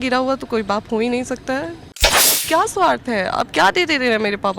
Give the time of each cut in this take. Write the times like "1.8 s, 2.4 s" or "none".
2.1 s